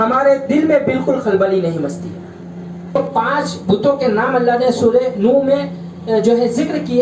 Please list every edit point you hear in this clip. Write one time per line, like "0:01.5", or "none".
0:03.0